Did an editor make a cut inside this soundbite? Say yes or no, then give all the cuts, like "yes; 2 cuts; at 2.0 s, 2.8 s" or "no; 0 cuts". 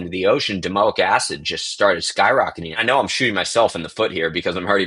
yes; 1 cut; at 2.7 s